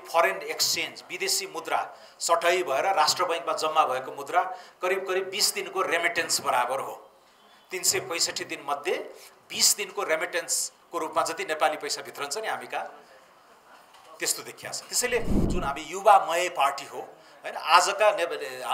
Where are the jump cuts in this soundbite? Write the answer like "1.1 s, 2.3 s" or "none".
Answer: 15.5 s

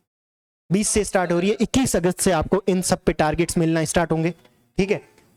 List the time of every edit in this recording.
none

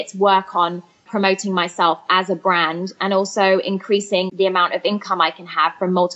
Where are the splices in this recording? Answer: 1.1 s, 4.3 s

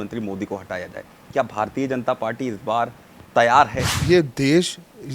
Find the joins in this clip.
4.0 s

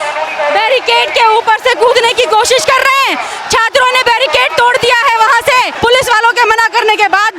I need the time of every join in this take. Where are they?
5.7 s

